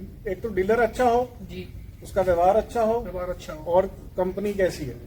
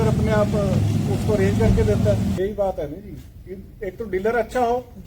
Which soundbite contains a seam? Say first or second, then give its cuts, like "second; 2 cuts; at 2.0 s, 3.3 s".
second; 1 cut; at 2.4 s